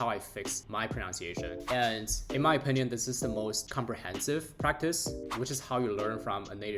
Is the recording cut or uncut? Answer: cut